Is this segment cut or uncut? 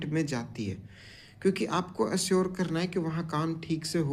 uncut